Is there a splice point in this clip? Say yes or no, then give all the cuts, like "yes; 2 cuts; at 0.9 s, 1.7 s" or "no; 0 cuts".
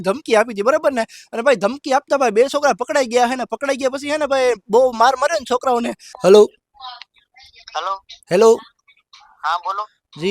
yes; 2 cuts; at 1.1 s, 6.0 s